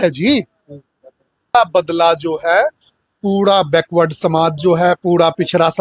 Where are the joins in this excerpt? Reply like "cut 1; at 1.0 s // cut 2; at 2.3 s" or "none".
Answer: cut 1; at 1.5 s